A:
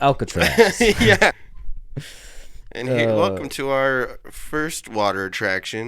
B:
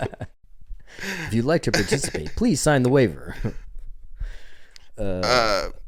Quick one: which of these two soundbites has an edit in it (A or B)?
A